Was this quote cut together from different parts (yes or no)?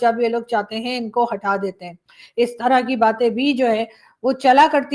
no